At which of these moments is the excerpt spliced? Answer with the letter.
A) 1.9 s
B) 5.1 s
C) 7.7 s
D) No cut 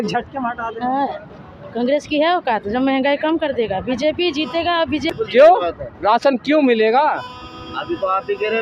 B